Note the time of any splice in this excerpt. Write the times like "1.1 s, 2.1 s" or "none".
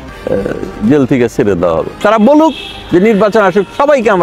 2.0 s